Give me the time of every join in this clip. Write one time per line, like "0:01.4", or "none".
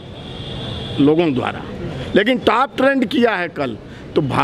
none

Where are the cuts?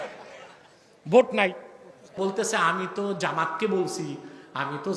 0:02.2

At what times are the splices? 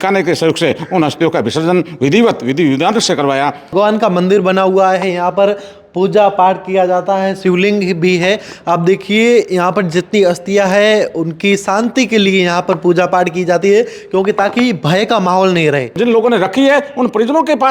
0:03.7
0:16.0

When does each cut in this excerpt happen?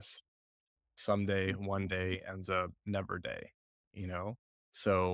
0:00.9

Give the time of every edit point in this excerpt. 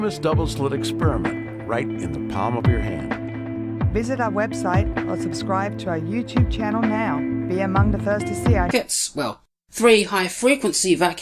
none

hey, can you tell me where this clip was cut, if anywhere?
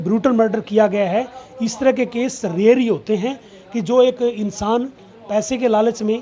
none

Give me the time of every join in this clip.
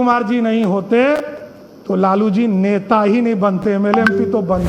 none

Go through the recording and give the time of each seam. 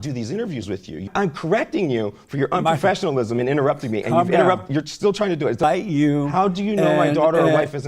0:01.1
0:05.6

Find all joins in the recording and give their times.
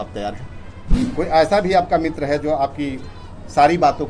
0:01.1

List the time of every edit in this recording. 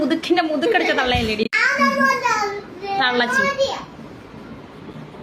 none

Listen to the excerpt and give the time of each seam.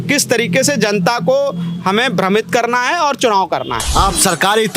0:03.8

